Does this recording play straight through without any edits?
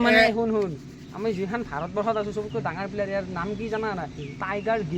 yes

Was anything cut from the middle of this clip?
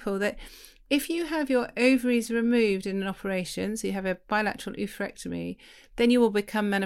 no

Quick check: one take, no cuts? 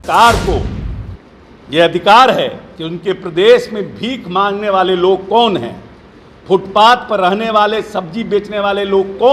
yes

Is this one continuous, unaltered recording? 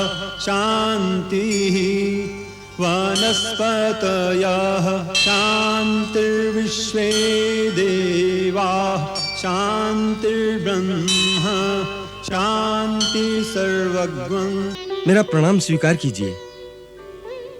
no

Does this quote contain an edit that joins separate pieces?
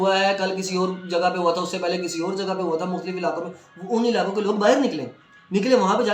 no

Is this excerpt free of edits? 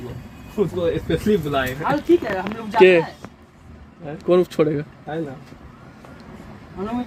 yes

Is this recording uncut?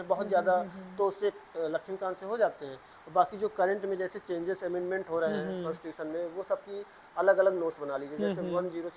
yes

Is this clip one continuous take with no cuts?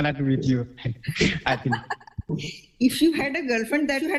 yes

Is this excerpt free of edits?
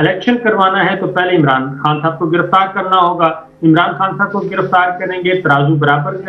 yes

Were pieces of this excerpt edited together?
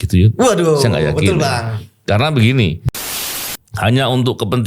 yes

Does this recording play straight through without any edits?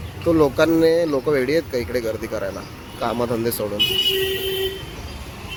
yes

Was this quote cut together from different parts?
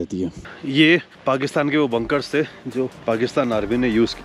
no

